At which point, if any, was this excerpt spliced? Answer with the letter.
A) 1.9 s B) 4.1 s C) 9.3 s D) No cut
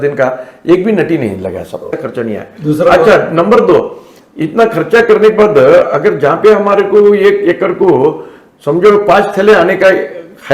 A